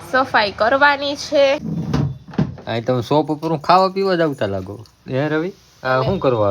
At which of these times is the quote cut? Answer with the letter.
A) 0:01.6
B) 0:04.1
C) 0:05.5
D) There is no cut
A